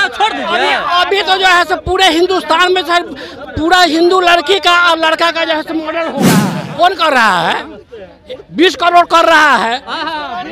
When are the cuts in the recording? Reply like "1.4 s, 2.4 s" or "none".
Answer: 6.3 s